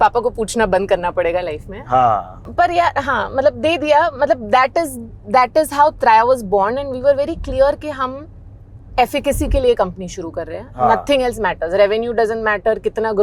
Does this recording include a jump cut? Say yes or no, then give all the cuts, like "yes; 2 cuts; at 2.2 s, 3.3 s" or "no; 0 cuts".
yes; 1 cut; at 2.4 s